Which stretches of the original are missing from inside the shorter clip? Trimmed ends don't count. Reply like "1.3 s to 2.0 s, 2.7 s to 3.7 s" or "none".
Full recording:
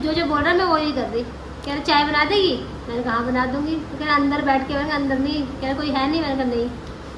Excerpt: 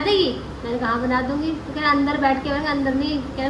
none